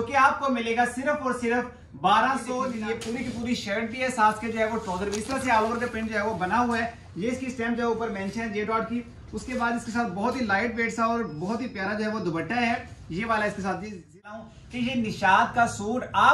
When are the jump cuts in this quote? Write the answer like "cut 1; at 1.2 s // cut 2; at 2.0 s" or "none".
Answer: cut 1; at 2.7 s // cut 2; at 14.4 s